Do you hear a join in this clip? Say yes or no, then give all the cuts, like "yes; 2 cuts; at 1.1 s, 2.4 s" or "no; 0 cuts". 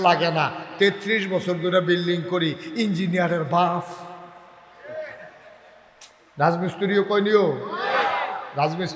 no; 0 cuts